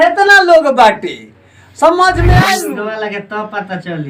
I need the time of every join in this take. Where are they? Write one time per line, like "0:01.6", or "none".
0:02.7